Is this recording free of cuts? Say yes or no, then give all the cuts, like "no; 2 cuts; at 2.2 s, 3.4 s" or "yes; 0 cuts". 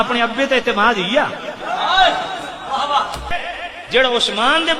no; 1 cut; at 3.3 s